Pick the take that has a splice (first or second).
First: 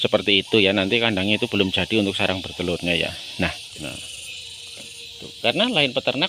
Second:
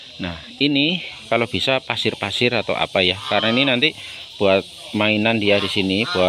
first